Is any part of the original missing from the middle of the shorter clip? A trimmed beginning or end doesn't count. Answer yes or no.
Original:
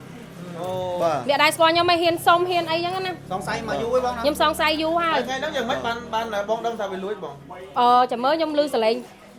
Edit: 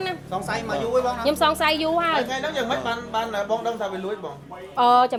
no